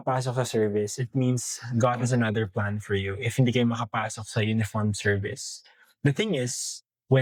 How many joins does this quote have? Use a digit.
0